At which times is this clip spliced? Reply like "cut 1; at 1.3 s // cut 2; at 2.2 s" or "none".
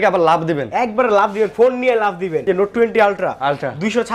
cut 1; at 2.5 s